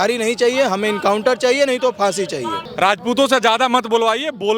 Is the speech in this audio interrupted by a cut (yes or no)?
yes